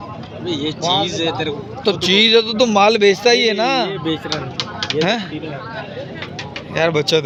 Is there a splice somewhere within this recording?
no; 0 cuts

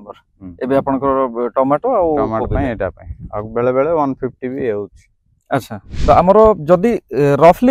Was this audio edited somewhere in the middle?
yes; 1 cut; at 5.8 s

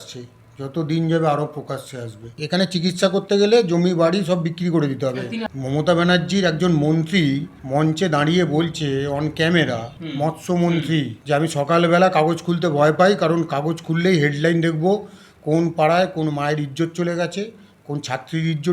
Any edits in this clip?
yes; 5 cuts; at 2.3 s, 5.5 s, 7.5 s, 10.0 s, 11.2 s

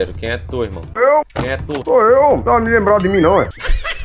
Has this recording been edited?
yes; 1 cut; at 1.8 s

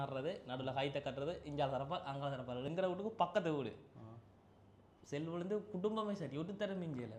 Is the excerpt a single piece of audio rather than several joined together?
no; 1 cut; at 2.7 s

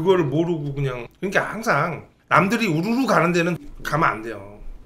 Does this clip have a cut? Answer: yes; 3 cuts; at 1.1 s, 2.1 s, 3.6 s

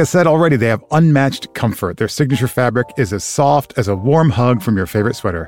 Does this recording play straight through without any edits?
yes; 0 cuts

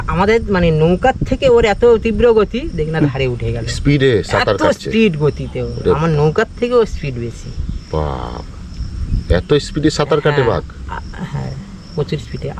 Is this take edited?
no; 0 cuts

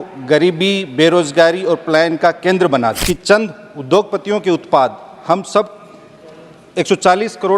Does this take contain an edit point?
yes; 1 cut; at 3.0 s

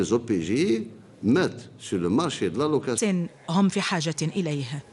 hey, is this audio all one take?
yes; 0 cuts

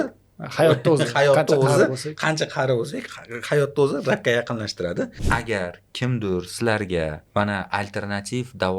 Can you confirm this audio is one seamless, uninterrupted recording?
no; 2 cuts; at 5.2 s, 7.2 s

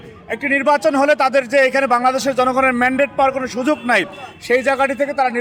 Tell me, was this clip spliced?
no; 0 cuts

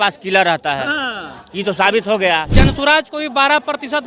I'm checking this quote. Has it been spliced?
yes; 1 cut; at 2.5 s

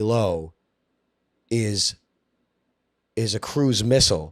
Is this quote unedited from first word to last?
yes; 0 cuts

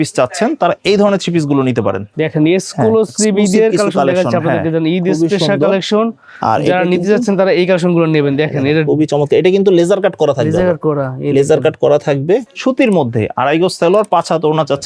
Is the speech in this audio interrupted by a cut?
yes; 2 cuts; at 2.1 s, 12.5 s

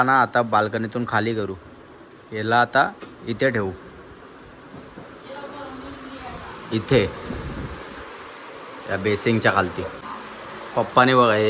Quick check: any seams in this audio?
yes; 1 cut; at 10.0 s

